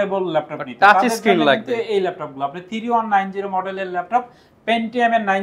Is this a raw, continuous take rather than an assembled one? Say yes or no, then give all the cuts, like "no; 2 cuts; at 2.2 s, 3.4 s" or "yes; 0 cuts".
yes; 0 cuts